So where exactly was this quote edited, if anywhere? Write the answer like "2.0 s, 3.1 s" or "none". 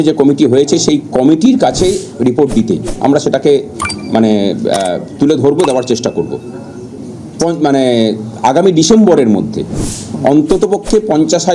7.0 s

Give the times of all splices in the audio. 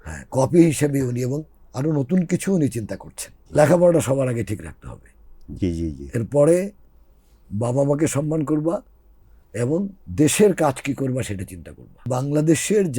3.4 s, 12.0 s

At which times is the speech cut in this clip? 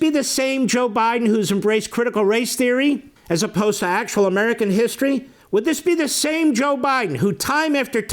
3.1 s, 5.3 s

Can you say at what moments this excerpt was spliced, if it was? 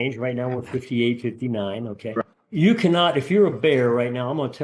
2.2 s

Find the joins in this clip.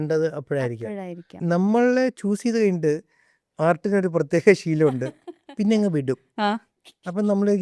1.3 s

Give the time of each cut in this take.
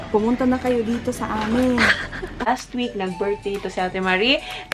2.5 s

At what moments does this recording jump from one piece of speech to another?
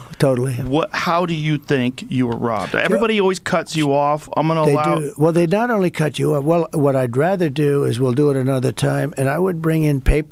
none

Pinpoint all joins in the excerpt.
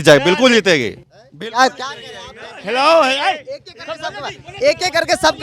none

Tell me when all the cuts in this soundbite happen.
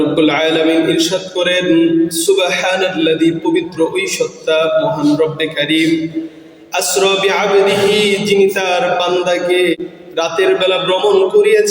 9.8 s

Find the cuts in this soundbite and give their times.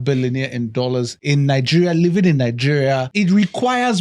1.2 s, 3.1 s

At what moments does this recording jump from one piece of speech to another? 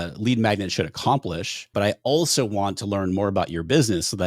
1.6 s

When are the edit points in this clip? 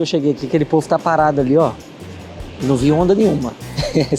none

